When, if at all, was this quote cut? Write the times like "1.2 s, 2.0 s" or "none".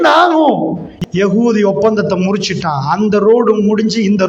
0.9 s